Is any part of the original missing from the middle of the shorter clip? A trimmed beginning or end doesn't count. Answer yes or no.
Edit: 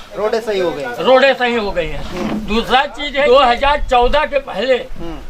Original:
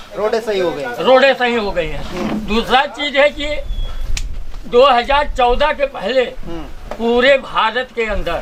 yes